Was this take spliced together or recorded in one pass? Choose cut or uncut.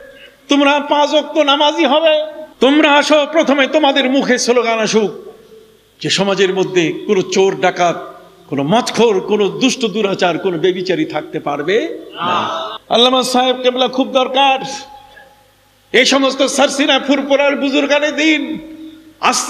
cut